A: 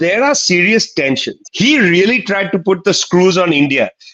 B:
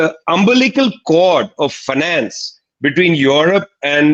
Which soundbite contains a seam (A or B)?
A